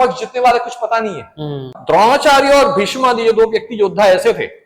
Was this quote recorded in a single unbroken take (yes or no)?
no